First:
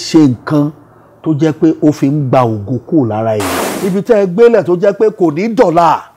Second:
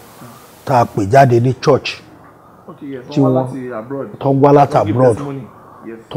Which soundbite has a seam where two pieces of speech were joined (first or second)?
first